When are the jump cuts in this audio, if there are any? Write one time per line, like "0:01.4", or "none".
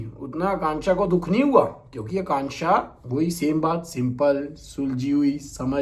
none